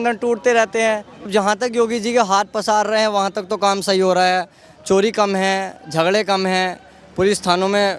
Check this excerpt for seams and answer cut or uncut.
cut